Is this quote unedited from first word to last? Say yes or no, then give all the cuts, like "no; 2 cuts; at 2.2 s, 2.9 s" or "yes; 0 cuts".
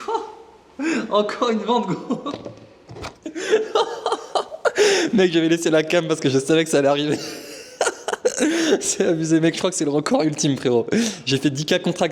yes; 0 cuts